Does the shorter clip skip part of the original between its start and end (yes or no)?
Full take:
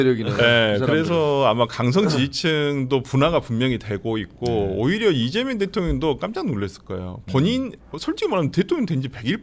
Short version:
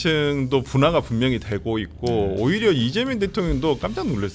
no